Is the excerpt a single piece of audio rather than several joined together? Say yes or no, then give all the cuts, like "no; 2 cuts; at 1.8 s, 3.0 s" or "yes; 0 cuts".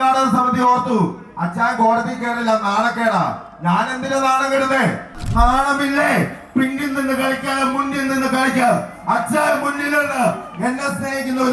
no; 1 cut; at 5.2 s